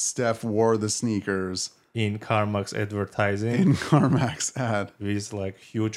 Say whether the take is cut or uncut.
uncut